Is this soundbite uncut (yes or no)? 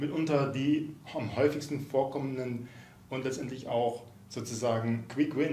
yes